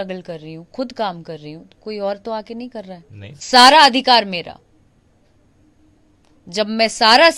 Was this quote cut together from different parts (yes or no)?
yes